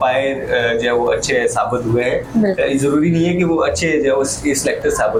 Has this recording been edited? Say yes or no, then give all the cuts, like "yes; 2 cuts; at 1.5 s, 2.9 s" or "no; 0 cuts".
no; 0 cuts